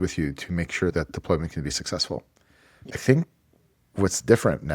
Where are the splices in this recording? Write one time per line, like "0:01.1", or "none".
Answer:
0:00.9
0:02.8

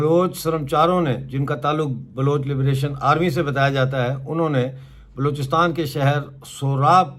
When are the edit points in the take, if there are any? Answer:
none

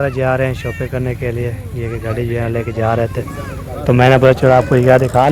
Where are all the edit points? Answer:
none

